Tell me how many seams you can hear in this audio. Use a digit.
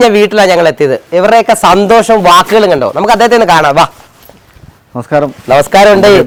0